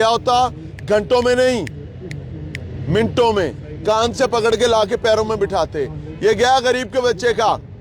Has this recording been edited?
no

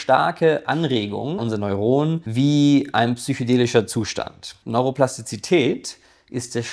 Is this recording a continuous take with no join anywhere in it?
no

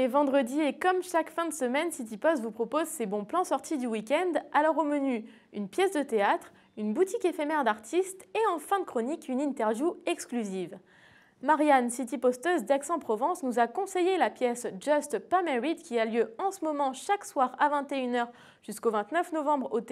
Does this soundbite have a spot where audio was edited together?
no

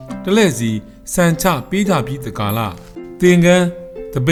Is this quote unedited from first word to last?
yes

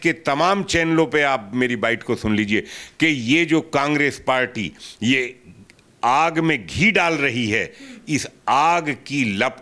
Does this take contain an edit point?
no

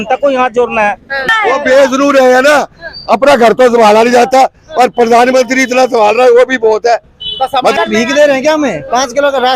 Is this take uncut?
no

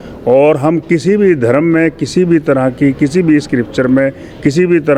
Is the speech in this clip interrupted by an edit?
no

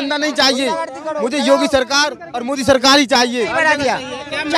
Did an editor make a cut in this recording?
no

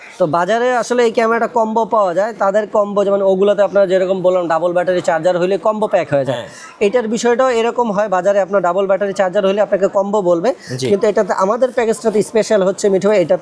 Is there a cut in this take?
no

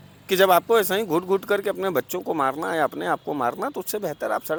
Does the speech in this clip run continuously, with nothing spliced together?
yes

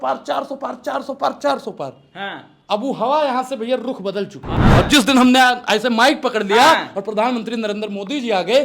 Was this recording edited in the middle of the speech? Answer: yes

